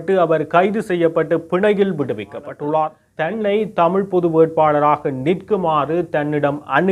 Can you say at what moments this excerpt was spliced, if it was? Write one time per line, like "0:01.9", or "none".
0:03.1